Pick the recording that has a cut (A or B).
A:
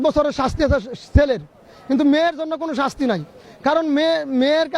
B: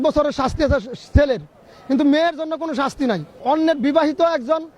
B